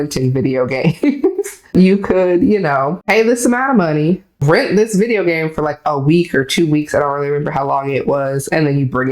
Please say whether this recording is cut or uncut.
cut